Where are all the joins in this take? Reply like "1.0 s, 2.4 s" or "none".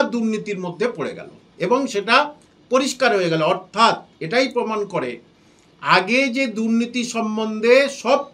none